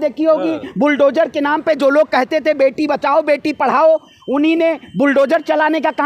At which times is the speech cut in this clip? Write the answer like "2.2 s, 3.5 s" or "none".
none